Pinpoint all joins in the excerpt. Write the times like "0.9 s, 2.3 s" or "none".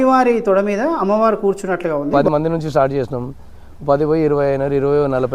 2.1 s